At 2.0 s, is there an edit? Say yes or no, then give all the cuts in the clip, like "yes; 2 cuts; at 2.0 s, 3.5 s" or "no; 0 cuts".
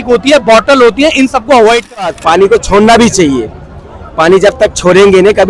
yes; 1 cut; at 2.0 s